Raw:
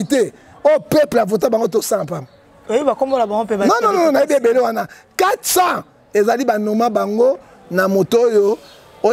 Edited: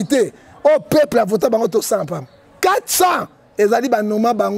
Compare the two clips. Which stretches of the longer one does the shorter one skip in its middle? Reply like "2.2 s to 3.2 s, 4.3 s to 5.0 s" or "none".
2.4 s to 5.0 s